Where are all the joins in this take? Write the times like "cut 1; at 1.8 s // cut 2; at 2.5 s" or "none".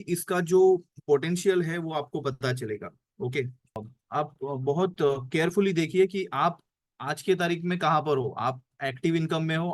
cut 1; at 3.9 s